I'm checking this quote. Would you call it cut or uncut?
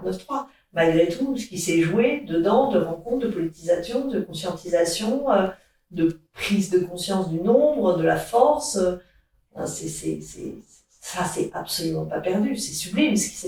uncut